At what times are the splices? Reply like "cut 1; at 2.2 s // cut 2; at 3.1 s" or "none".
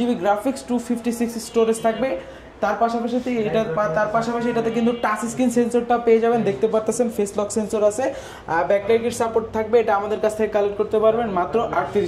none